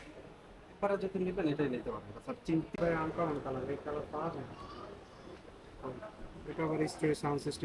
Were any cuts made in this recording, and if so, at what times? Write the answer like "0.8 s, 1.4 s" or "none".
2.7 s

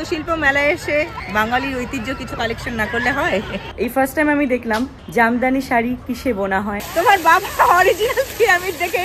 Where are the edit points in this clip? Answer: 1.2 s, 3.6 s, 5.0 s, 6.8 s

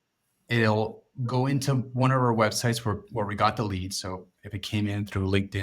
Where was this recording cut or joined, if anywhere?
3.0 s

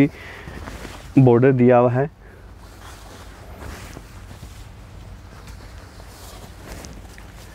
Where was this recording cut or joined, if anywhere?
none

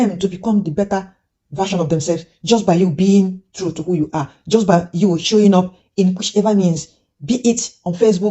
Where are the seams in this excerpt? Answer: none

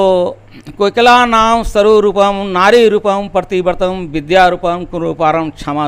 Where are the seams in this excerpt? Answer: none

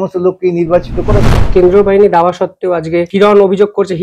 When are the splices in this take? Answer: 1.5 s, 3.1 s

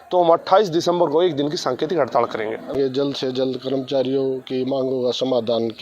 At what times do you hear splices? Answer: 2.7 s

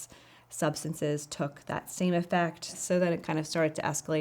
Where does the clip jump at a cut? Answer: 2.7 s

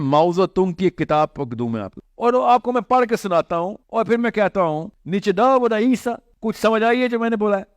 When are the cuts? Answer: 1.9 s, 3.8 s, 4.9 s, 6.3 s

